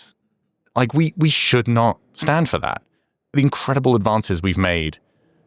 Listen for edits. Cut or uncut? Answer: cut